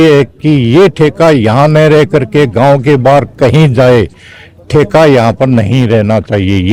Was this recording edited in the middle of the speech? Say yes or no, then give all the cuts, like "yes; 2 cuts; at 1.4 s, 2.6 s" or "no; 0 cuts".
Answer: no; 0 cuts